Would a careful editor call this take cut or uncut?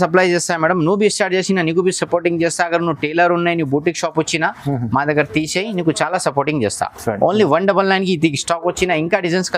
uncut